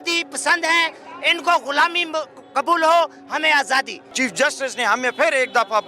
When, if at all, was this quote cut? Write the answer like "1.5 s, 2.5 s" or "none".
4.0 s